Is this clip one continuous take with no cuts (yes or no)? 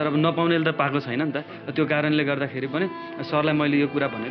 yes